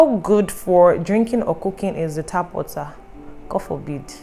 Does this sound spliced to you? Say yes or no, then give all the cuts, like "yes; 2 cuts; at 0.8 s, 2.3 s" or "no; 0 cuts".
no; 0 cuts